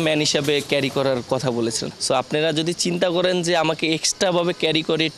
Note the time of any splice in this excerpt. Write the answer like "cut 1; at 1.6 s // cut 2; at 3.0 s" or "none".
cut 1; at 1.8 s